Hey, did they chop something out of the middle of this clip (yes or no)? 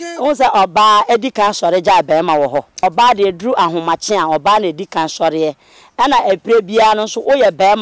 yes